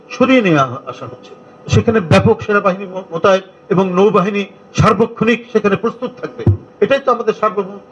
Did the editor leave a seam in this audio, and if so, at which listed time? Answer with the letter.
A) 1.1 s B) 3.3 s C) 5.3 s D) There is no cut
D